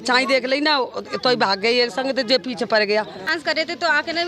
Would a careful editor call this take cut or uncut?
cut